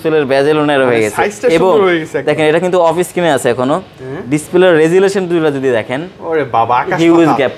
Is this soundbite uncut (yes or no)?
yes